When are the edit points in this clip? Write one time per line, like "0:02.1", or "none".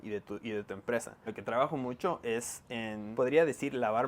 0:01.3
0:03.0